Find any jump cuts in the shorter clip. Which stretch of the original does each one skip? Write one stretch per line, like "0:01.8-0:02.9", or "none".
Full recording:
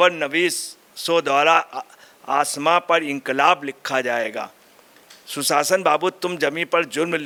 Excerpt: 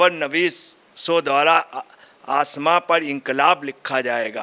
none